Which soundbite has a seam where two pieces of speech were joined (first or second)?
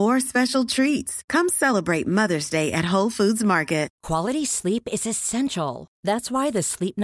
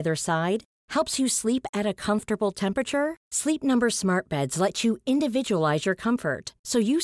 first